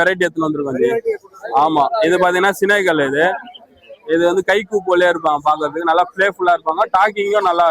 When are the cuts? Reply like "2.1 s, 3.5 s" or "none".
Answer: none